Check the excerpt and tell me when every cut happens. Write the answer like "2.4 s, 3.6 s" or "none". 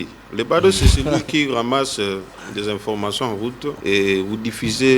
3.8 s